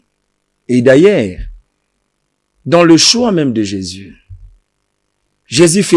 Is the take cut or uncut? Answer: uncut